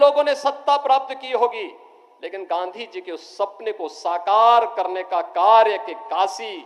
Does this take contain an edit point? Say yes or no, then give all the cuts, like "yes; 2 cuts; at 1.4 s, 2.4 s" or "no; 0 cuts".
no; 0 cuts